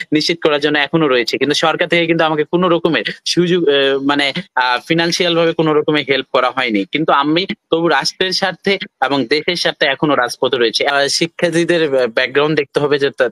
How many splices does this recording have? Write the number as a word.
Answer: one